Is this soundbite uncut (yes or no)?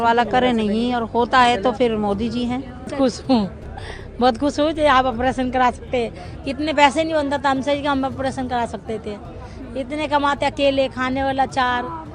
no